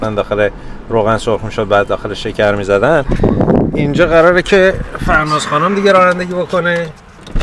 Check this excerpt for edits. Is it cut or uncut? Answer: cut